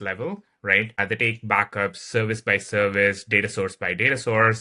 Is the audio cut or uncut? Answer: cut